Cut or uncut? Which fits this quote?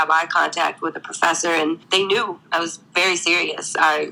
uncut